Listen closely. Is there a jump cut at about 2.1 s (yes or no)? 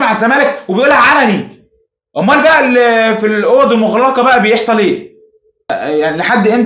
no